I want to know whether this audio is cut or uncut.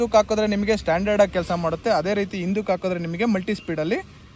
uncut